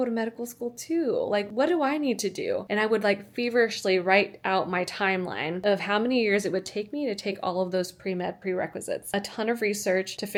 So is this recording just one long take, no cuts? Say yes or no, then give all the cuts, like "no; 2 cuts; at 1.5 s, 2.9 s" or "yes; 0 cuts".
yes; 0 cuts